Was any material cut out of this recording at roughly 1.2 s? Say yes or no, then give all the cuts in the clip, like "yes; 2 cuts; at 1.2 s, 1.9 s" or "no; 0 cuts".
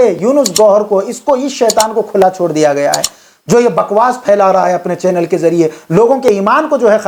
no; 0 cuts